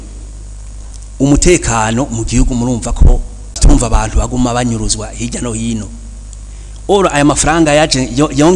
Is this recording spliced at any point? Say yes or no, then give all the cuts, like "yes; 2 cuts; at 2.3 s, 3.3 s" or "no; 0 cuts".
yes; 1 cut; at 3.6 s